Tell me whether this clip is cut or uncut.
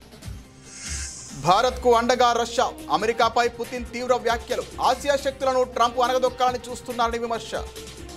cut